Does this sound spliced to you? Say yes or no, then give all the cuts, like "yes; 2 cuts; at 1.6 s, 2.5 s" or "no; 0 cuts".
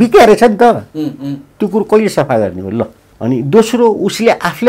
yes; 1 cut; at 3.0 s